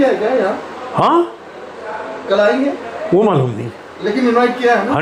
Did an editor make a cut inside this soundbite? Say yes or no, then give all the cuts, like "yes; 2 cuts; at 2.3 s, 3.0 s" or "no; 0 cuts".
no; 0 cuts